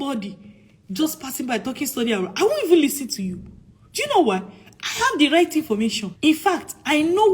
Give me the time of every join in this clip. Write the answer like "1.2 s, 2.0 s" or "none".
6.1 s